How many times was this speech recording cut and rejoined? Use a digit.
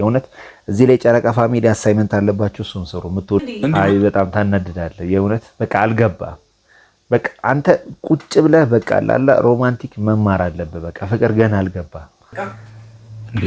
2